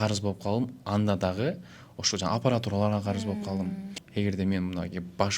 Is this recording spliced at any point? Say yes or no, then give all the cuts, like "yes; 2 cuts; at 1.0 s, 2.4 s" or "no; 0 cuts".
yes; 1 cut; at 4.0 s